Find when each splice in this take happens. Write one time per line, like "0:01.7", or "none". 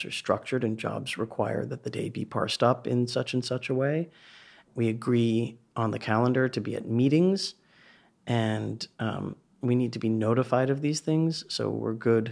0:04.6